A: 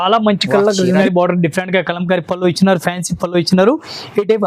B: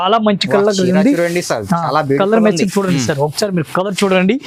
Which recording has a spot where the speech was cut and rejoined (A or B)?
A